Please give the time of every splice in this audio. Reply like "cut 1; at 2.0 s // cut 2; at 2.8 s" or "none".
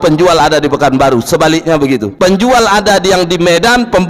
cut 1; at 2.1 s